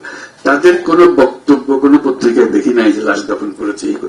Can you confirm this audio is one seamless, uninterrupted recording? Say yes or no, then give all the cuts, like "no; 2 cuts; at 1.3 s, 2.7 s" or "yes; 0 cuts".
yes; 0 cuts